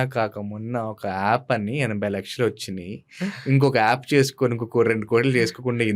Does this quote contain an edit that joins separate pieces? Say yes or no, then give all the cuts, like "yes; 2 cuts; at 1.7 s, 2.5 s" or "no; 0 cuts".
no; 0 cuts